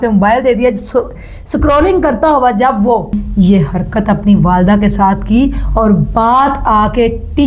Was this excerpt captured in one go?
no; 1 cut; at 3.2 s

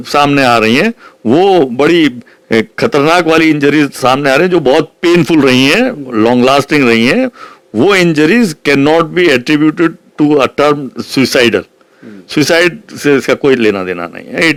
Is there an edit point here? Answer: no; 0 cuts

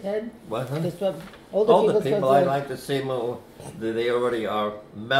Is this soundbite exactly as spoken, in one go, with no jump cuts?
yes; 0 cuts

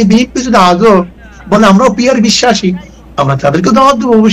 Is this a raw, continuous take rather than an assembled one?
yes; 0 cuts

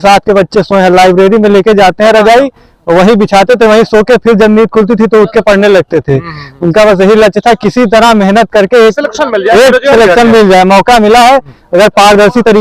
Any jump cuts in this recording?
no; 0 cuts

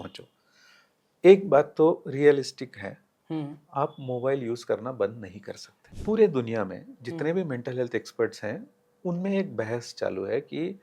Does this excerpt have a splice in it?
yes; 1 cut; at 5.9 s

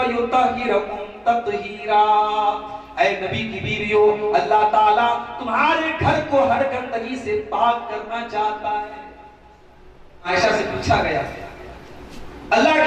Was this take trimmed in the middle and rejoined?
yes; 1 cut; at 10.3 s

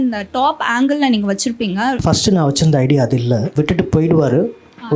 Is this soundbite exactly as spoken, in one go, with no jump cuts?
no; 2 cuts; at 2.0 s, 3.5 s

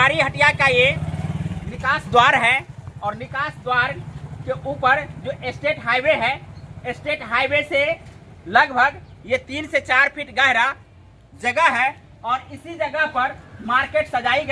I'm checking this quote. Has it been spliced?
no; 0 cuts

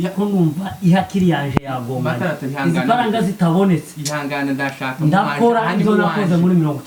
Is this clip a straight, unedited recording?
yes; 0 cuts

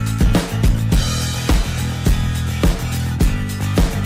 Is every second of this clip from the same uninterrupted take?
yes; 0 cuts

